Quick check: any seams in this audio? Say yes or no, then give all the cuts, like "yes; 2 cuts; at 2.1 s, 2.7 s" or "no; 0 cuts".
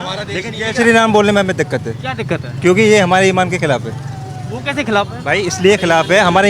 no; 0 cuts